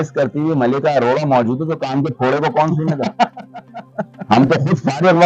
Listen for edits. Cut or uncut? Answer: uncut